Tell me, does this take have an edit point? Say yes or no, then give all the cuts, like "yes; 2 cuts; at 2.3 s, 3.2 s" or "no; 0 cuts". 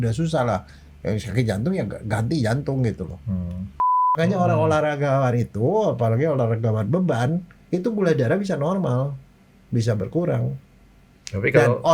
yes; 1 cut; at 4.1 s